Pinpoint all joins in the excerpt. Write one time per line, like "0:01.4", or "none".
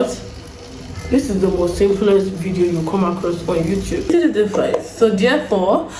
0:04.1